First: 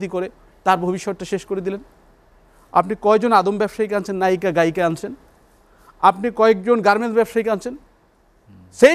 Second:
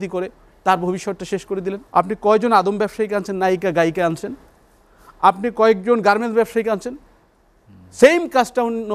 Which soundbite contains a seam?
second; 1 cut; at 1.8 s

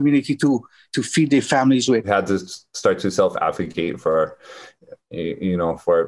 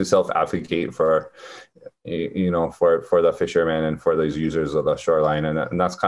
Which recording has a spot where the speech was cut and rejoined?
first; 1 cut; at 2.1 s

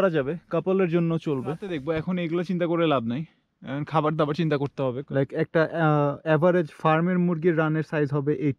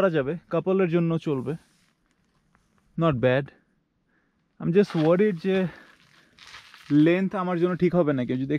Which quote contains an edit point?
first; 2 cuts; at 1.7 s, 5.0 s

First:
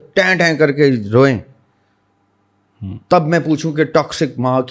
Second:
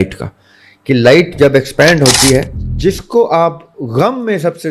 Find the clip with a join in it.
second; 1 cut; at 2.6 s

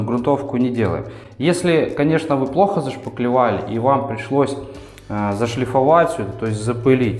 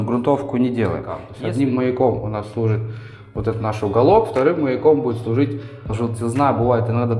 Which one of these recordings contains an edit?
second; 2 cuts; at 1.3 s, 5.9 s

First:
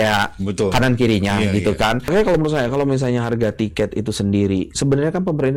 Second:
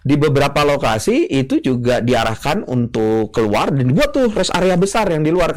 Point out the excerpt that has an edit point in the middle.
first; 1 cut; at 2.1 s

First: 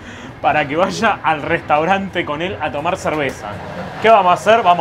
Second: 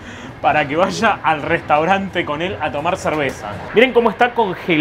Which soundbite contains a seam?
second; 1 cut; at 3.6 s

